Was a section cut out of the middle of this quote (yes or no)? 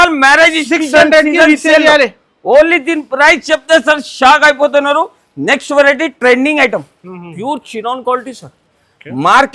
no